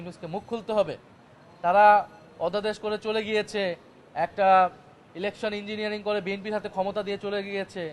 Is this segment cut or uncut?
uncut